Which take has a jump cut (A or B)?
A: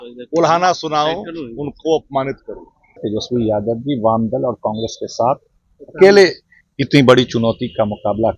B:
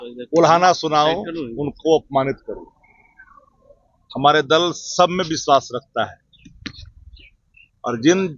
A